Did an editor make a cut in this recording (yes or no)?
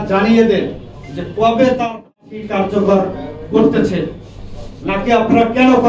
no